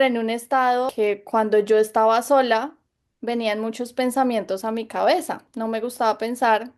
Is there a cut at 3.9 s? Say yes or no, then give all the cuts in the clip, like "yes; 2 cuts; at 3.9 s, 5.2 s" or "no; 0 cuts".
no; 2 cuts; at 0.9 s, 5.4 s